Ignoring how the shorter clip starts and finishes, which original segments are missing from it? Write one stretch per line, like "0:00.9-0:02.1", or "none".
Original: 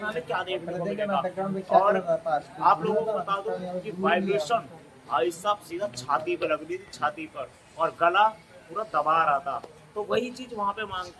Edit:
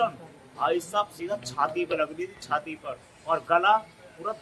none